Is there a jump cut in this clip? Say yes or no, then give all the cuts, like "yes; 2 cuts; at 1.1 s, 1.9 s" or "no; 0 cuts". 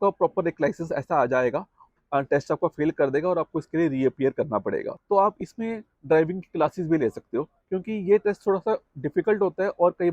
yes; 3 cuts; at 1.9 s, 4.9 s, 7.6 s